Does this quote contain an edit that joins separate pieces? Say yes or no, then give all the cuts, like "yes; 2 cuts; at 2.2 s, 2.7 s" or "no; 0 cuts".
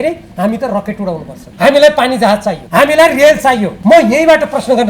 yes; 3 cuts; at 1.4 s, 2.6 s, 3.7 s